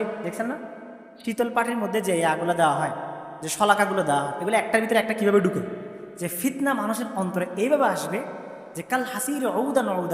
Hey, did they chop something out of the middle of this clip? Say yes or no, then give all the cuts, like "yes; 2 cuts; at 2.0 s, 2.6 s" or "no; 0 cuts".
yes; 1 cut; at 6.0 s